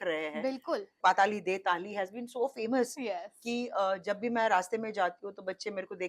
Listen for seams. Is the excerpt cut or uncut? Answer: cut